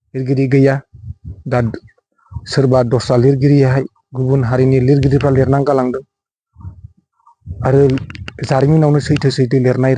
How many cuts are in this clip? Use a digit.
0